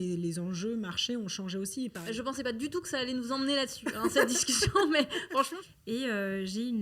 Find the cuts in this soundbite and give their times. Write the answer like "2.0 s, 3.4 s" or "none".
2.0 s, 5.5 s